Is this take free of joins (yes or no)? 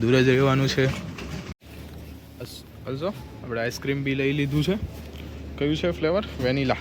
no